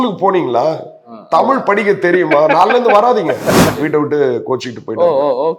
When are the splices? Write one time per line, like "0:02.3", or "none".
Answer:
0:03.7